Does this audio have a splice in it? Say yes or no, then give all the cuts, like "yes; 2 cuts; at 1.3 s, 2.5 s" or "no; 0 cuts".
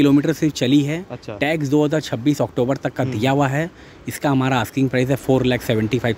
no; 0 cuts